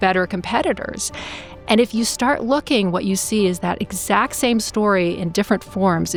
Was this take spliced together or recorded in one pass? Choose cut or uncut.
uncut